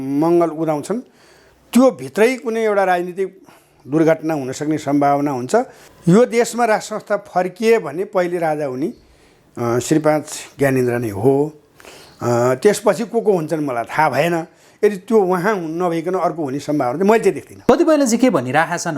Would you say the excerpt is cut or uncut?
cut